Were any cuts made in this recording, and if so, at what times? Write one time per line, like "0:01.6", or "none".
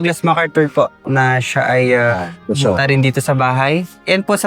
0:01.1
0:02.3